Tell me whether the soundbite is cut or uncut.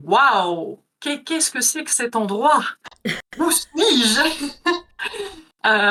uncut